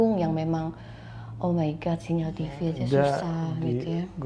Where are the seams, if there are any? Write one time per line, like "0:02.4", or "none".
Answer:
none